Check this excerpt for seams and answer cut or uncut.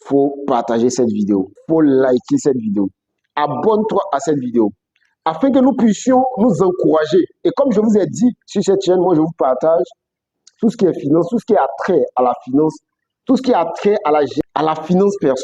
cut